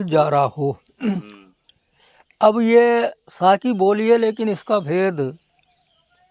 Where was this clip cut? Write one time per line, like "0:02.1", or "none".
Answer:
none